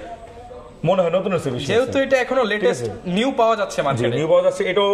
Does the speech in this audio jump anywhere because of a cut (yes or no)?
no